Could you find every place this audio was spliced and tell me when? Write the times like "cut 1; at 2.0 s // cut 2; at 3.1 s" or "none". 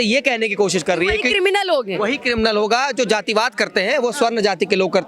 none